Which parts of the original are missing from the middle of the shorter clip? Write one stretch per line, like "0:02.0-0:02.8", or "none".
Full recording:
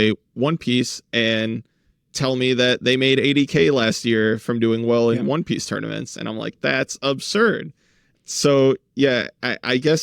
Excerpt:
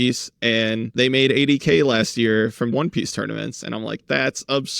0:01.6-0:02.8
0:04.6-0:05.2